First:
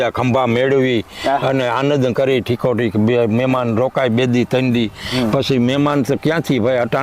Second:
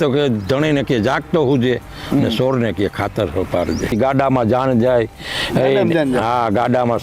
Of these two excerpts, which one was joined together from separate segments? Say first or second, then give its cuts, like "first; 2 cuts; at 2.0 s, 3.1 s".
second; 1 cut; at 3.9 s